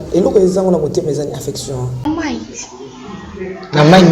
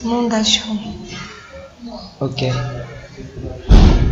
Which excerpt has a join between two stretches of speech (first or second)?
first